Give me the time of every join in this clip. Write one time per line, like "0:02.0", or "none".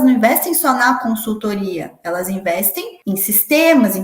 0:02.9